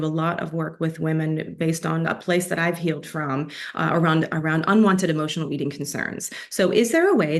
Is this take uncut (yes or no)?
yes